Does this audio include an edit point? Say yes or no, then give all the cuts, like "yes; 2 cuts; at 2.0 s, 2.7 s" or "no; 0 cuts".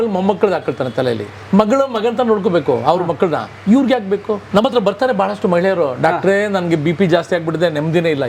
yes; 2 cuts; at 1.4 s, 4.4 s